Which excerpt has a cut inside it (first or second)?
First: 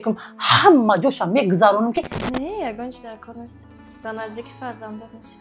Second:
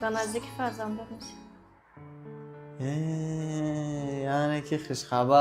first